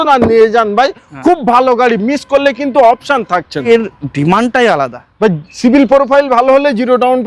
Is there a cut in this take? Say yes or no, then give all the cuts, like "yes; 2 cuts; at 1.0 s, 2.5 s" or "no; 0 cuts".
yes; 1 cut; at 3.6 s